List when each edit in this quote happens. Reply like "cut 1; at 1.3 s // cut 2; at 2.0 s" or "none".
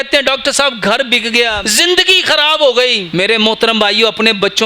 cut 1; at 1.6 s // cut 2; at 3.0 s